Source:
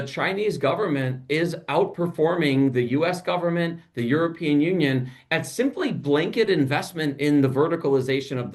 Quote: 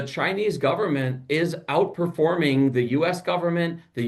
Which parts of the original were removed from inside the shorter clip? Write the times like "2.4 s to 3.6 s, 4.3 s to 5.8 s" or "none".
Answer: none